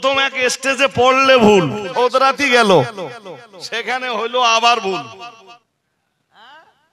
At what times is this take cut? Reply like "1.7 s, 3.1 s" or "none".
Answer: 1.9 s, 5.6 s